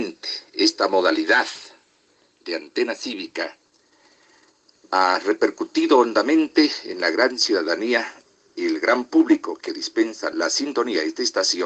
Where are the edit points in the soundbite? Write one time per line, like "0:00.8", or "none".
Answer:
0:10.3

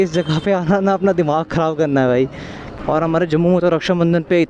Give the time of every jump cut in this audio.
0:02.7

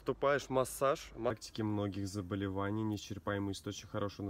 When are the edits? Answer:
0:01.4

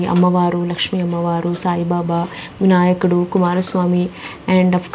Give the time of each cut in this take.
none

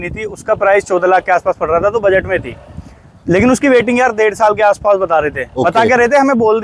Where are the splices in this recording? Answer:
none

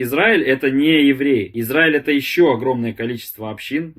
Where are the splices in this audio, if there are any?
0:01.6

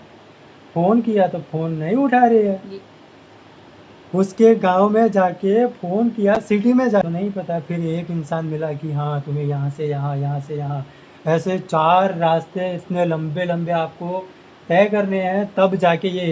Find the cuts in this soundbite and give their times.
none

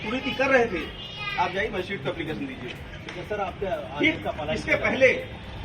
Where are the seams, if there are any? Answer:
none

